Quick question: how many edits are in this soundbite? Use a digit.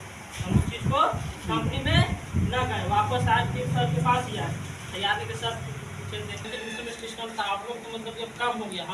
1